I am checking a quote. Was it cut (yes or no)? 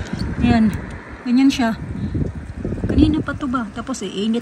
no